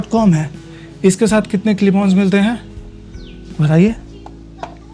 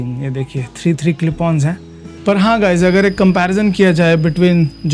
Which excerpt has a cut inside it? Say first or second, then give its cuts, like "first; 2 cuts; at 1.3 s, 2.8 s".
second; 1 cut; at 2.0 s